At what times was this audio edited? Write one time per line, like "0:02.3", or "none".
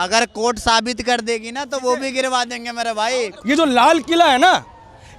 0:03.3